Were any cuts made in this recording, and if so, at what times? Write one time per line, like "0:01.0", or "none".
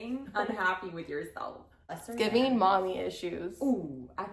0:02.0